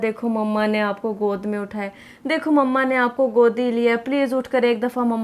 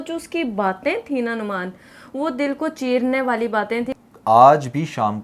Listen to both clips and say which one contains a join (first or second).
second